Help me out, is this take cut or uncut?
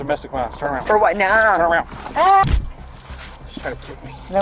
cut